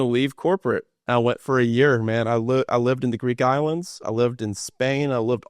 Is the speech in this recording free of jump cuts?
no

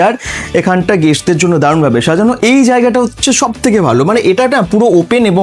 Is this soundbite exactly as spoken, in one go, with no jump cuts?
no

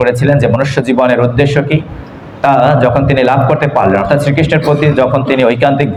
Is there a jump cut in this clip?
no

